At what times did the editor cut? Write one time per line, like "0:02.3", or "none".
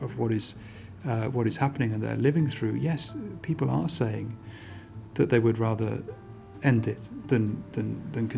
none

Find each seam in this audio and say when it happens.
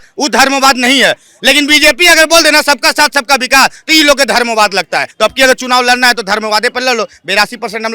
0:05.1

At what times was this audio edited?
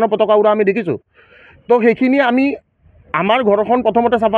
none

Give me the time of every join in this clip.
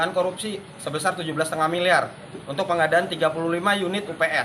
none

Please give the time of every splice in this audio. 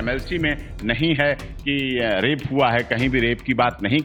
none

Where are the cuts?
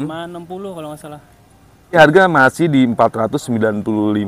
0:02.0

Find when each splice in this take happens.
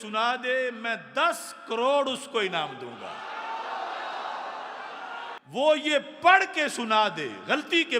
0:05.4

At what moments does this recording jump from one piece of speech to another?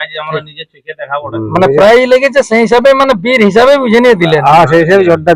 none

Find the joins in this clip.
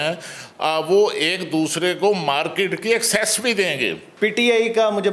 0:04.0

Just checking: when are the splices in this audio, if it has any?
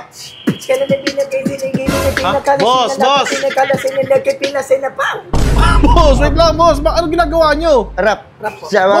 none

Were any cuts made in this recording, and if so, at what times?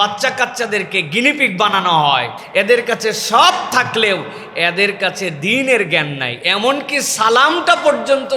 0:02.4

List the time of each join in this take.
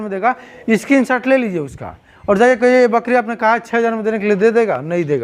none

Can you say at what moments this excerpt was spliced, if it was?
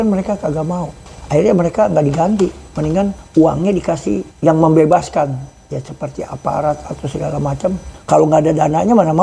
0:01.0
0:03.2
0:04.3
0:07.9

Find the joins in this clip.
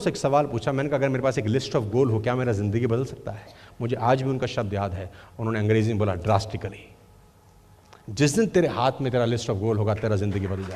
none

